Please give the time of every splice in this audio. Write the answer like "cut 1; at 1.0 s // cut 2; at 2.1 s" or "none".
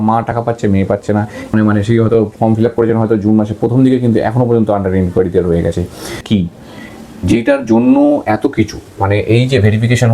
cut 1; at 1.5 s // cut 2; at 6.2 s